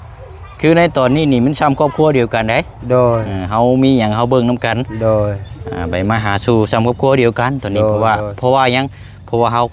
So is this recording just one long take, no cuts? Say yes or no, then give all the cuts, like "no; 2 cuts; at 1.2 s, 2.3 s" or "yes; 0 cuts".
yes; 0 cuts